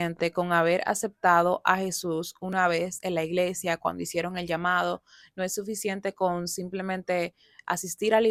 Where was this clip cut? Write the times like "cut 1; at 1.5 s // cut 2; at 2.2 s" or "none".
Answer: none